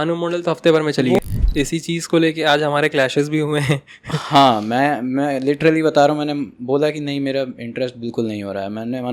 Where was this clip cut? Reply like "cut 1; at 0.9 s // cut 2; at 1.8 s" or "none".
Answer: cut 1; at 1.1 s